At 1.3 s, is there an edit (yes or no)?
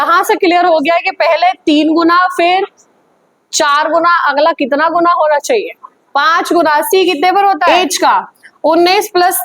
no